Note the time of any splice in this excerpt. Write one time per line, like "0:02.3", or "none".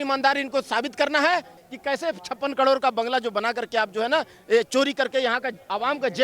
0:01.6